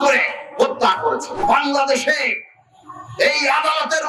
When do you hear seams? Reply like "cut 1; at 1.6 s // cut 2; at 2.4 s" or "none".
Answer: cut 1; at 1.4 s